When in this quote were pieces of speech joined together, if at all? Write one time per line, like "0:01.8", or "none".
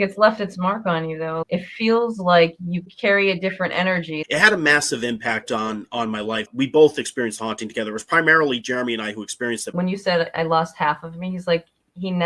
0:01.4
0:02.8
0:04.2
0:06.5
0:09.7